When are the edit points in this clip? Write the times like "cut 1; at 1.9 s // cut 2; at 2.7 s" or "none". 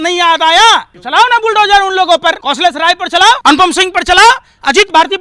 cut 1; at 1.0 s // cut 2; at 2.4 s // cut 3; at 3.4 s